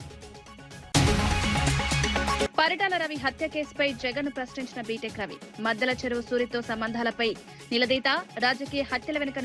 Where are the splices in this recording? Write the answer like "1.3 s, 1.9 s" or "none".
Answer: 0.9 s, 2.5 s